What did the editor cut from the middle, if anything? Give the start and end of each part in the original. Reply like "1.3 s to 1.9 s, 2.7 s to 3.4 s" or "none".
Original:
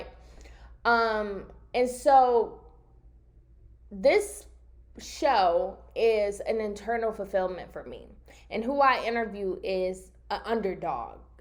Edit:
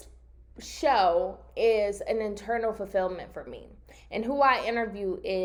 none